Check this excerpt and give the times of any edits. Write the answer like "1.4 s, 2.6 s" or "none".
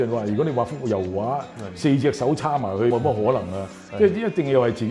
2.9 s